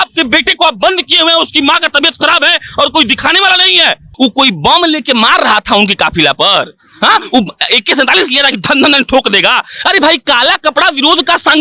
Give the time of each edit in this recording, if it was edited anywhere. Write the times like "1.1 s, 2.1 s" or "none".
4.1 s